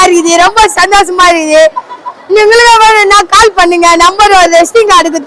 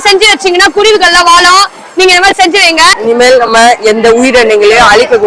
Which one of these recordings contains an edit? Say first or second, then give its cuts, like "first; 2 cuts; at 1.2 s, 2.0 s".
second; 1 cut; at 3.0 s